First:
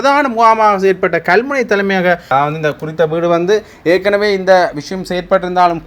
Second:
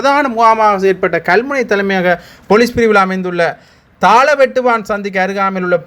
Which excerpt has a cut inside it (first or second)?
first